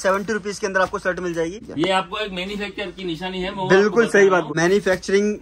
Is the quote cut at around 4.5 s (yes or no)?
yes